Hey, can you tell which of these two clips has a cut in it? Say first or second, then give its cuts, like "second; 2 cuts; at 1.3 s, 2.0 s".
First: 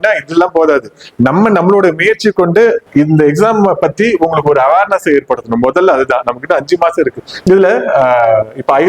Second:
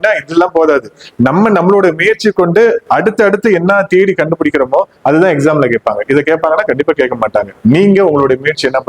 first; 2 cuts; at 2.8 s, 7.4 s